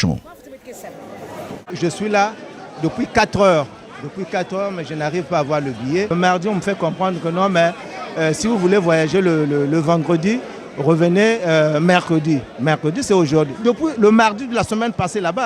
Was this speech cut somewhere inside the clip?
yes; 1 cut; at 1.8 s

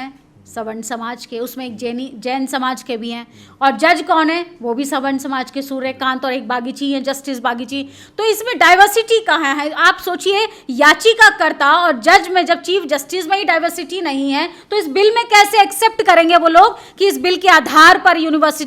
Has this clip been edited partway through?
no; 0 cuts

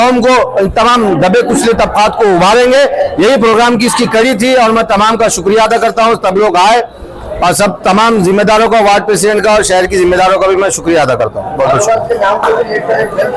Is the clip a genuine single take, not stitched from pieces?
yes; 0 cuts

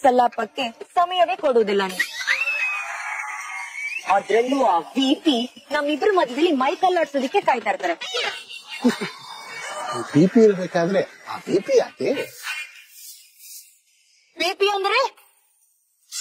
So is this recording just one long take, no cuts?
yes; 0 cuts

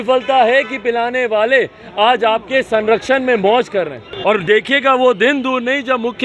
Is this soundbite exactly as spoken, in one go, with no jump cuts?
no; 1 cut; at 4.0 s

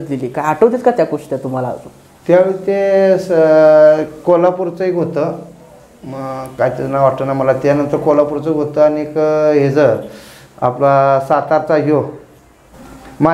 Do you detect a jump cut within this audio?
no; 0 cuts

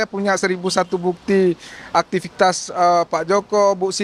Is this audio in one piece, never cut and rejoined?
yes; 0 cuts

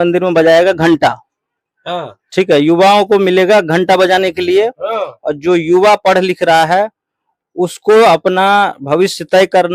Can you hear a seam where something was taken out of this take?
no; 0 cuts

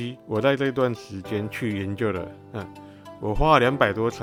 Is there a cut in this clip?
no; 0 cuts

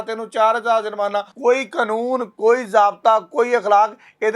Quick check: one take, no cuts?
no; 1 cut; at 1.3 s

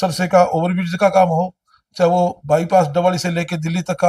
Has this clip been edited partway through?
no; 0 cuts

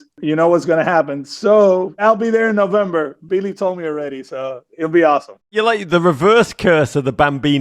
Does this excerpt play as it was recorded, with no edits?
yes; 0 cuts

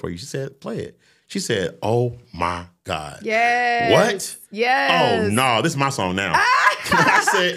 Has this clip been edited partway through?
no; 0 cuts

